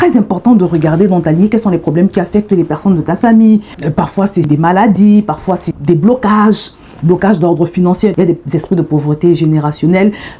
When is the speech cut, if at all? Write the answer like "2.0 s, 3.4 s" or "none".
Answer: 4.1 s, 5.7 s